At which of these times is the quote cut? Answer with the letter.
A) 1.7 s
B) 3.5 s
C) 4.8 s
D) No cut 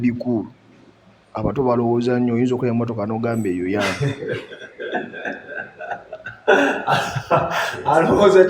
D